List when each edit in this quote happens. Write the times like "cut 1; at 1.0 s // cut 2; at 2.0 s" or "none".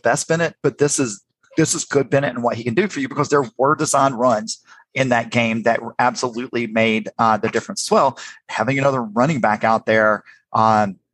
none